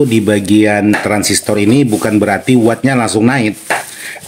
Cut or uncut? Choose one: uncut